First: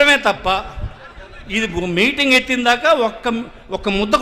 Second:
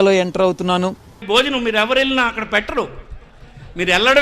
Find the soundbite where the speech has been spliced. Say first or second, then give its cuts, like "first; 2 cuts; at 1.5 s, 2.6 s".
second; 1 cut; at 1.2 s